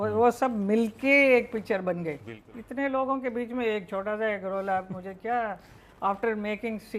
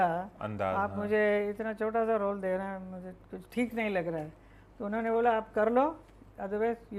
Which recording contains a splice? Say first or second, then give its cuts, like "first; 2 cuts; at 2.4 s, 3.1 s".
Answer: first; 1 cut; at 2.3 s